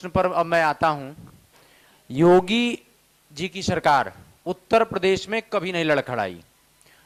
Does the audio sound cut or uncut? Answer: uncut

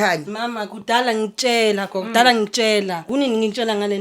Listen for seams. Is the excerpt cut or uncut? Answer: cut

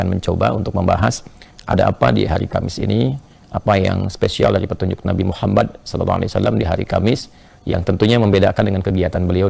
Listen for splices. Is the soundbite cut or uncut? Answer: uncut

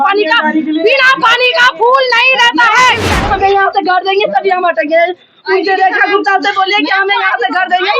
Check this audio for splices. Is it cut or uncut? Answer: cut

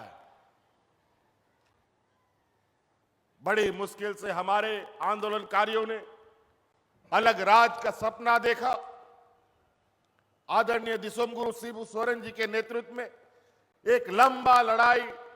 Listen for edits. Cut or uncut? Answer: cut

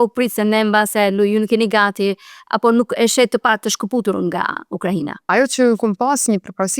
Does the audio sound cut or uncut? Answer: cut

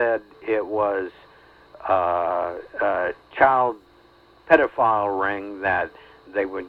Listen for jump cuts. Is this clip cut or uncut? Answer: uncut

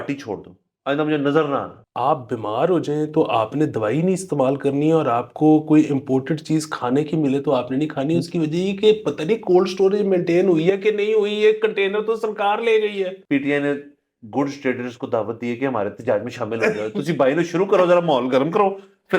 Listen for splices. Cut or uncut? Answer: cut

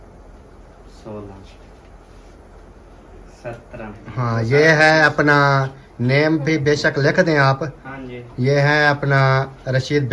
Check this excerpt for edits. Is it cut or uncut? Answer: cut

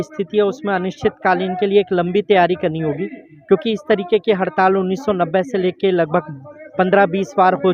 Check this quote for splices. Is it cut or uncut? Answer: uncut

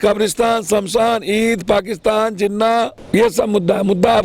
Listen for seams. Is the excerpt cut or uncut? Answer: cut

